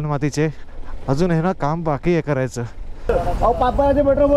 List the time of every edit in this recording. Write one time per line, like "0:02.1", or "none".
0:03.1